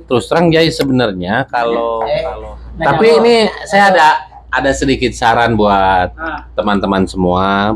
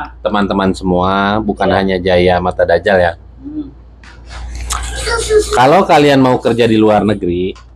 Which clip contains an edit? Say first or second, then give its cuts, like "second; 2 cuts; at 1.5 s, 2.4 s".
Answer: first; 1 cut; at 2.1 s